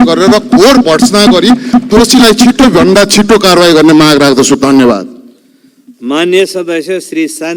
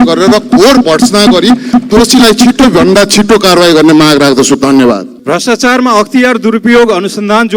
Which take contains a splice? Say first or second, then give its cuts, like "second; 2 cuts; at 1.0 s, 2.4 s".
second; 1 cut; at 5.1 s